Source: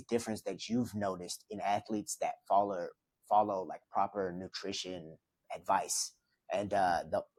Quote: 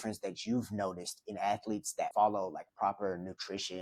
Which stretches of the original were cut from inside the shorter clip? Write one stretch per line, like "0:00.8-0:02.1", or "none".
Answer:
0:02.3-0:03.2